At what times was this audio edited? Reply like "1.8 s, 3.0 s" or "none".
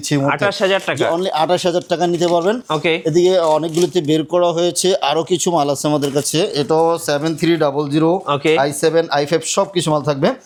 none